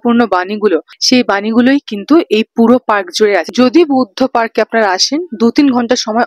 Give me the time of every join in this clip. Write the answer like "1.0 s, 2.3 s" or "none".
0.9 s, 3.5 s